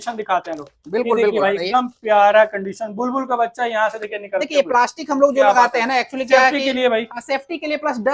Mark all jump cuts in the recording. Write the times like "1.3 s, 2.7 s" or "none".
none